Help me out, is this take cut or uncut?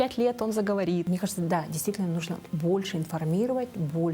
cut